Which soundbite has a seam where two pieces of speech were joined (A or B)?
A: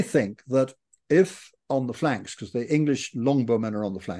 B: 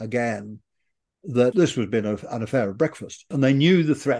B